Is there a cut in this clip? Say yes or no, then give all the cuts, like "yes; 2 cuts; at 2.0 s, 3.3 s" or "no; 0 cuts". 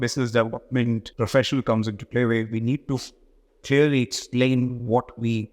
yes; 1 cut; at 1.1 s